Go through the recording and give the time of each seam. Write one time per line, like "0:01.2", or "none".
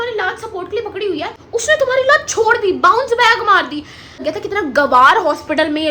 0:01.4
0:04.2